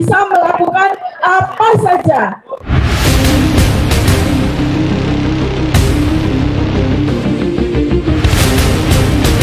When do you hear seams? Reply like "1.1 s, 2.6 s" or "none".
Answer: 2.5 s